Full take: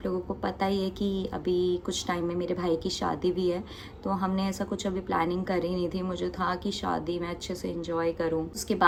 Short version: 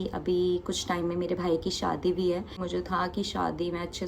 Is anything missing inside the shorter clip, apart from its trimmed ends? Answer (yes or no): yes